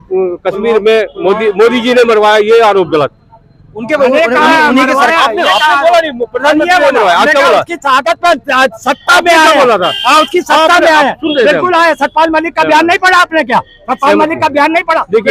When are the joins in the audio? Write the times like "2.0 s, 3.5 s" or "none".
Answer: none